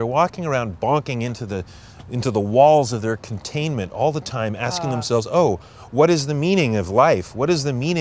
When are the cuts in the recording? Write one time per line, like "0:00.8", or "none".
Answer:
none